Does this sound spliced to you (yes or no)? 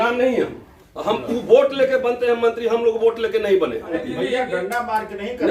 yes